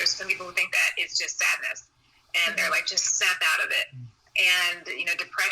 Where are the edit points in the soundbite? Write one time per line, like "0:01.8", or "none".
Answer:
none